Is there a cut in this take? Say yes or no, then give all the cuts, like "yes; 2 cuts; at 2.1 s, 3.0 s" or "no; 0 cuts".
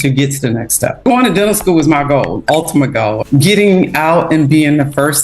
yes; 2 cuts; at 1.0 s, 3.2 s